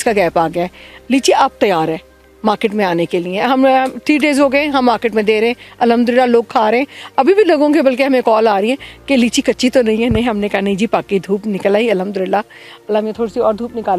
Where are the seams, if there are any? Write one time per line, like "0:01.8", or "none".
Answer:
none